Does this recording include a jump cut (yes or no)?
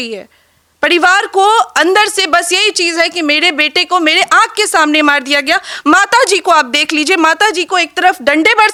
no